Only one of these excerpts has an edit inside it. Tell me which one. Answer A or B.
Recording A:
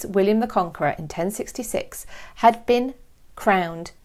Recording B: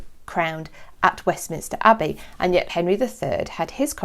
B